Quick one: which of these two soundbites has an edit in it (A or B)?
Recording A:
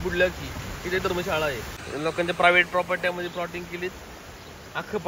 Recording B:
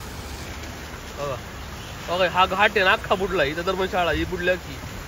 A